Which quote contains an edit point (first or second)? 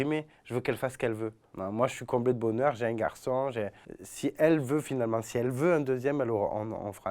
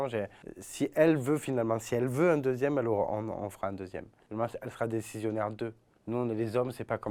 first